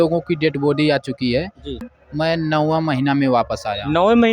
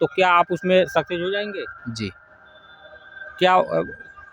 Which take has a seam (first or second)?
first